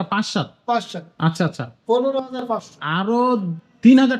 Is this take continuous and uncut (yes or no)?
yes